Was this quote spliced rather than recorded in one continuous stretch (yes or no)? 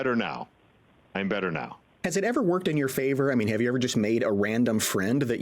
yes